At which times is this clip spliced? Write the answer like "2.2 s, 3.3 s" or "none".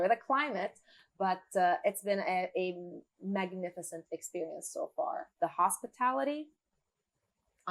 none